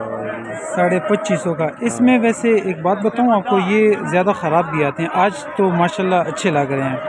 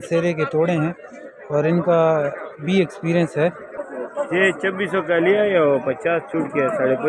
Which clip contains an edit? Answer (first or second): second